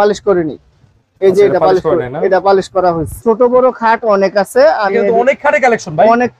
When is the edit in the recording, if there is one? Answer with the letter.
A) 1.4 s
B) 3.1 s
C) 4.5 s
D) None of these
B